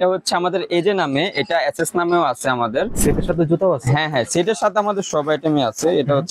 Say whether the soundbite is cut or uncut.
cut